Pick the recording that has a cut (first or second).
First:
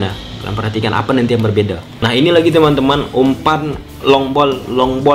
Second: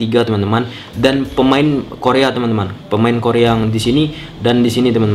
first